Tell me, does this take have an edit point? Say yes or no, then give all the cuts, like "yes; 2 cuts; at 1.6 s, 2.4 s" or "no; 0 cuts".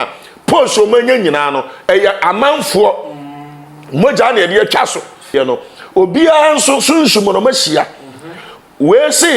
yes; 1 cut; at 5.3 s